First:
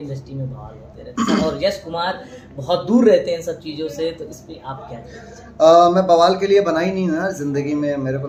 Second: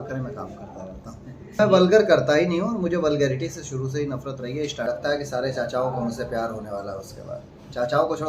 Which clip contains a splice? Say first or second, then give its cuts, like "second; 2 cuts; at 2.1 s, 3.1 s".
second; 2 cuts; at 1.6 s, 4.9 s